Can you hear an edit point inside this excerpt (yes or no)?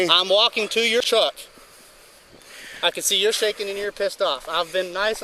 yes